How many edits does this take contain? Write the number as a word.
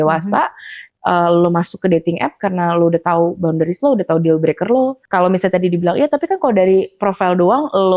one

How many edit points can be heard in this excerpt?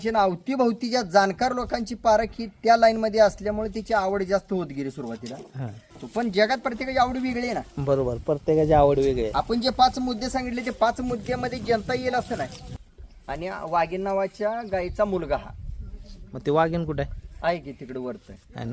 two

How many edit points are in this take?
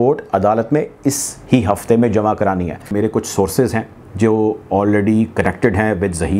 one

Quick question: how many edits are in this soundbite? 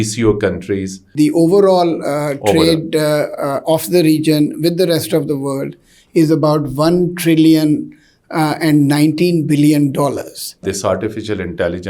two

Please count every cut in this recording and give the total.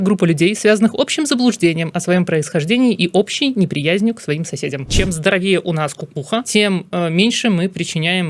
two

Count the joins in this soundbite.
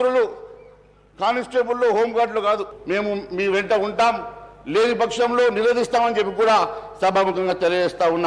one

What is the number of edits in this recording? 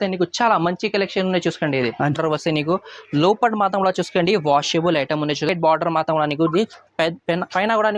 two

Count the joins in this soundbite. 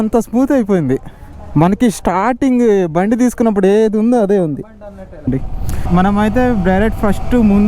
one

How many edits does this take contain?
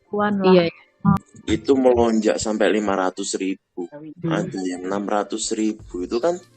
two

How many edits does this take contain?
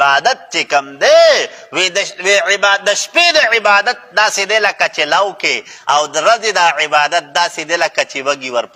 zero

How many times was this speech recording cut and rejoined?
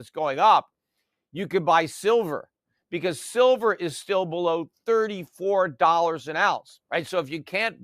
one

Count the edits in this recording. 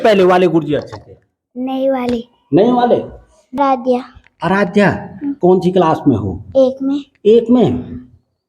one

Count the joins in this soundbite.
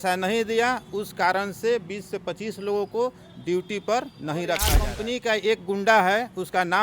one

